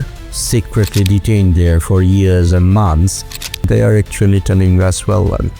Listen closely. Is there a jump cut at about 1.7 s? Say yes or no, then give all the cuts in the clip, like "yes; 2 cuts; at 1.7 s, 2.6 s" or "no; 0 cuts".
no; 1 cut; at 3.6 s